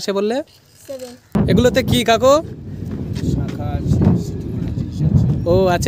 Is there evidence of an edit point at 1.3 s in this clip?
yes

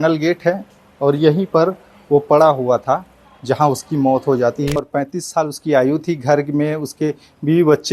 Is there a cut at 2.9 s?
no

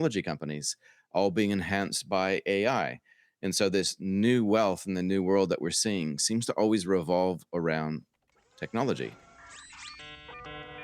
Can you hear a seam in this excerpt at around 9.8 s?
yes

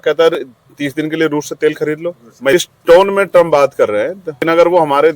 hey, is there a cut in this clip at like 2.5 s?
yes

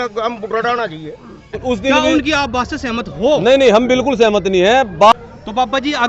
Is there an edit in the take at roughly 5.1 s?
yes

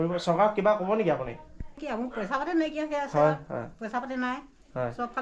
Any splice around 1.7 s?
yes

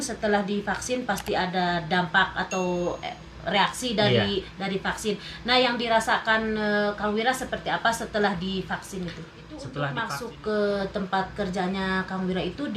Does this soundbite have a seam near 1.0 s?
no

